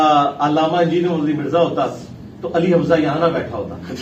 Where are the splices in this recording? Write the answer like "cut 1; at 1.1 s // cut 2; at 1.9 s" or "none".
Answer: none